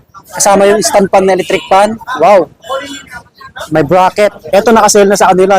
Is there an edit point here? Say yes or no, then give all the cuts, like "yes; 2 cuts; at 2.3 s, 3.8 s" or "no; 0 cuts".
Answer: yes; 1 cut; at 4.4 s